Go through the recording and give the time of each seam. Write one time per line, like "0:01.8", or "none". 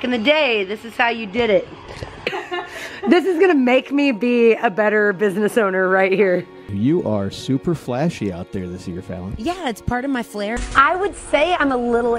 0:02.4
0:06.7
0:10.6